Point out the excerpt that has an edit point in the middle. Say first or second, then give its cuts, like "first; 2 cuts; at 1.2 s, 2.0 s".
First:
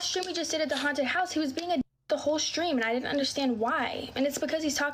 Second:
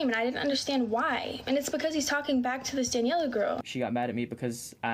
second; 1 cut; at 3.6 s